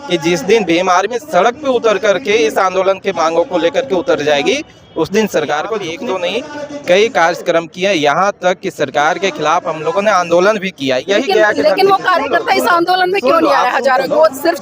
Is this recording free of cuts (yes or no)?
no